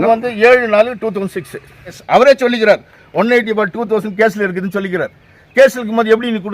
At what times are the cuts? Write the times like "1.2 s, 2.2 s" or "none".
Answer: 2.0 s